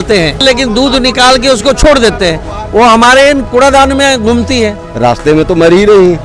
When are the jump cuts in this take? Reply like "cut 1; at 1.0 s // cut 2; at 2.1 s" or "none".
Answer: cut 1; at 3.5 s // cut 2; at 4.8 s